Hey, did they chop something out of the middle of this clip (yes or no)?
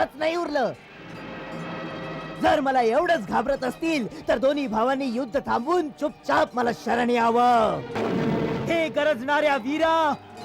yes